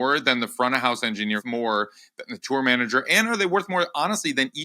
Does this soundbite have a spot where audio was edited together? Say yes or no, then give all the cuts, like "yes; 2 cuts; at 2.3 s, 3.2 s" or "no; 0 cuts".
yes; 1 cut; at 1.4 s